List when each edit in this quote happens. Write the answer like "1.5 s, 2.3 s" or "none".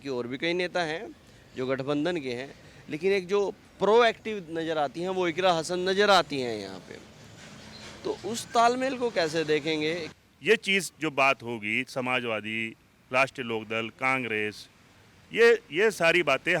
10.1 s